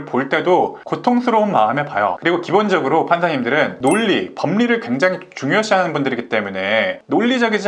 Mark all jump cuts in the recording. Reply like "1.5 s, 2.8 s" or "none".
none